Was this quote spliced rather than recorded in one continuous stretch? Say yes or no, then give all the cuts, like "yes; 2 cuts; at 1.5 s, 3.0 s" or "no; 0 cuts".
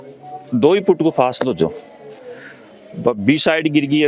no; 0 cuts